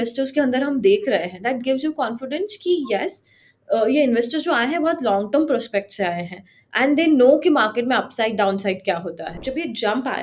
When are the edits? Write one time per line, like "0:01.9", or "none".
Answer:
0:09.3